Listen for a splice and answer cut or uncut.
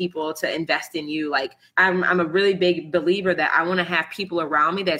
cut